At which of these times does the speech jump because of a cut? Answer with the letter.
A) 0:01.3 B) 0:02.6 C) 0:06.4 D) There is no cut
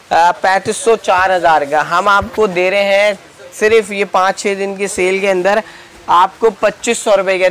D